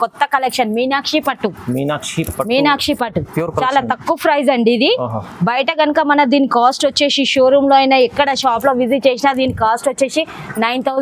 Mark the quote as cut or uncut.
uncut